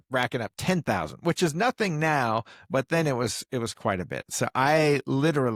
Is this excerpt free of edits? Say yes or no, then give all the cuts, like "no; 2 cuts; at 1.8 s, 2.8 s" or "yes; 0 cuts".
yes; 0 cuts